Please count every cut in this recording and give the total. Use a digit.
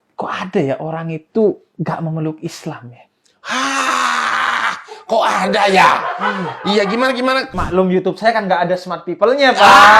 1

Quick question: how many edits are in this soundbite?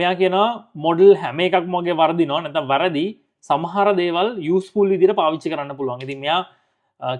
0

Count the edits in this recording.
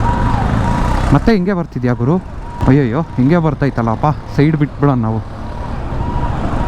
1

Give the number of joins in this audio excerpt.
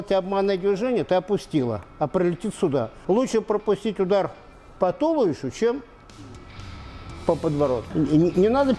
2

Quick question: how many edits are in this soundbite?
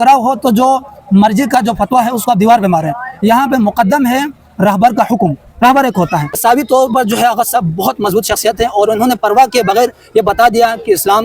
1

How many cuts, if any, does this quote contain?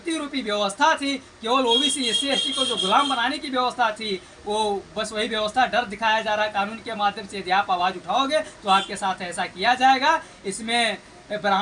0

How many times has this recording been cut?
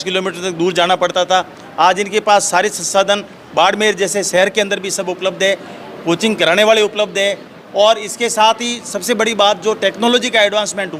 0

